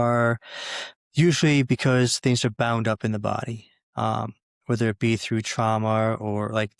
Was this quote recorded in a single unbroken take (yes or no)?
yes